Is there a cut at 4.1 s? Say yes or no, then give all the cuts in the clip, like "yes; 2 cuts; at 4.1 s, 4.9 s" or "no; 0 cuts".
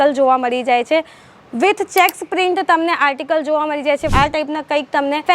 yes; 1 cut; at 4.1 s